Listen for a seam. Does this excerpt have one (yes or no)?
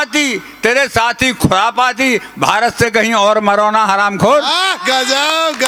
no